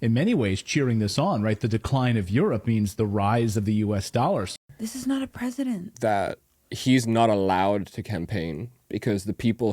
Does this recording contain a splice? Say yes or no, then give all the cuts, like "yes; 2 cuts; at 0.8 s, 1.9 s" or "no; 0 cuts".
yes; 1 cut; at 4.5 s